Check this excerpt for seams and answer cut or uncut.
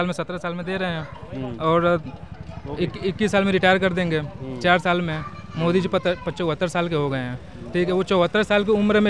uncut